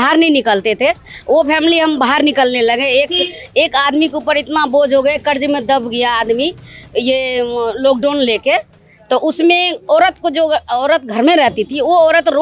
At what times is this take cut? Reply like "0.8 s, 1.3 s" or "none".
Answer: none